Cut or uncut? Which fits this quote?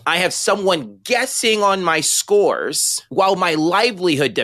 uncut